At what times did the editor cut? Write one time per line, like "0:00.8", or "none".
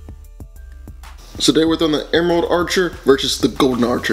none